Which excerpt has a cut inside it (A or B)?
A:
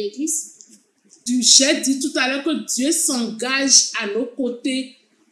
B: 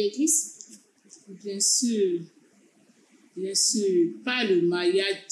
A